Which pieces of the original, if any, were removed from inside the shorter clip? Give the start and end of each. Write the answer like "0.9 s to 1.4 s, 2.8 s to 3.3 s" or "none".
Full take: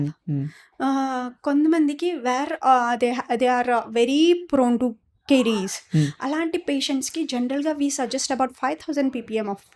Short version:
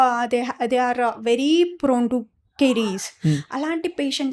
none

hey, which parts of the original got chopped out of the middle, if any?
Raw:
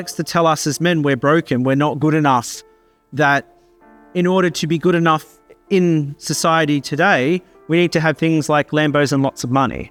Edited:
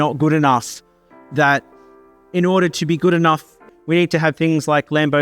5.5 s to 7.5 s

